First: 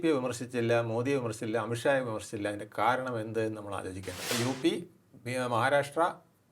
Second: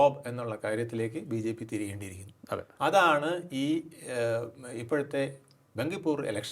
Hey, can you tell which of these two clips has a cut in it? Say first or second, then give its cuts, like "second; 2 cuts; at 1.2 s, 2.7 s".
first; 1 cut; at 4.3 s